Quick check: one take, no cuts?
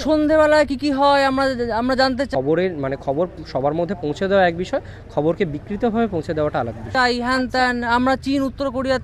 no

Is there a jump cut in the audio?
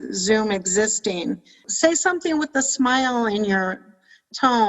yes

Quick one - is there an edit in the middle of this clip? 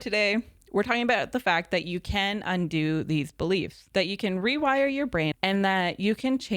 yes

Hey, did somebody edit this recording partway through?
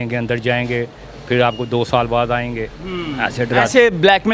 no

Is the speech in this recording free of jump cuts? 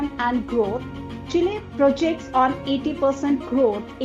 yes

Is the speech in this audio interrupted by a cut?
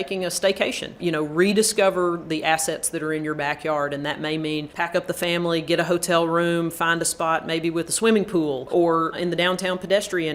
no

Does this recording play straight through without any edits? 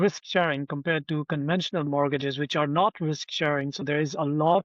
yes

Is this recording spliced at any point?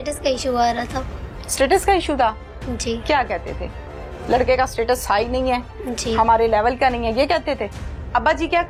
no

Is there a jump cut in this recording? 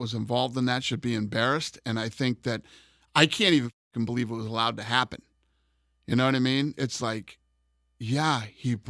no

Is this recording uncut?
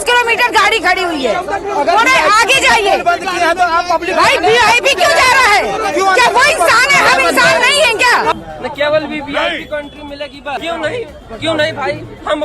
no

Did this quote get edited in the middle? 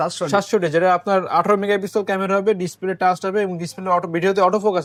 no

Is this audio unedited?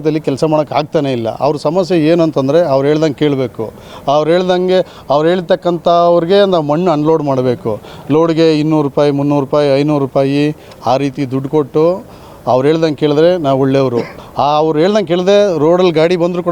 yes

